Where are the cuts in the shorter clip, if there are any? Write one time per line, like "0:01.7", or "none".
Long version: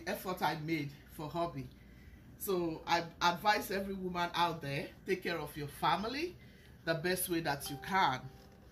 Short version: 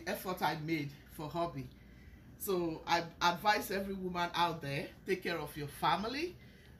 none